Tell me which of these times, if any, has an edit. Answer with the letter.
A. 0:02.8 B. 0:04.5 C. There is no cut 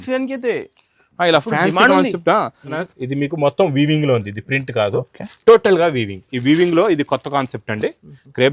A